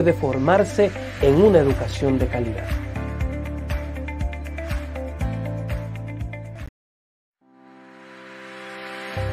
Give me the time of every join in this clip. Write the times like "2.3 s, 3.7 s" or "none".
6.6 s